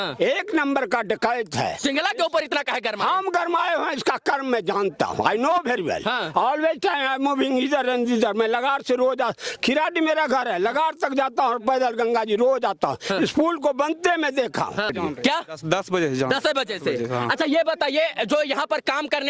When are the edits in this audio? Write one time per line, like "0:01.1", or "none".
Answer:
none

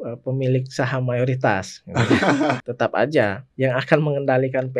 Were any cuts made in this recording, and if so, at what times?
0:02.7
0:03.4

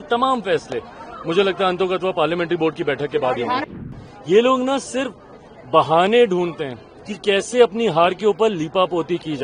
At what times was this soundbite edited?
0:03.7

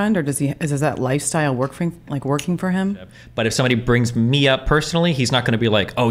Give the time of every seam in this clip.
0:03.2

